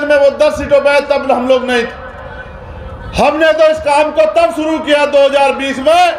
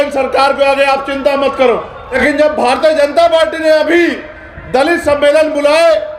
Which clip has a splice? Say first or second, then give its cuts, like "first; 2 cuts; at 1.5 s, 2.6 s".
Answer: second; 1 cut; at 2.1 s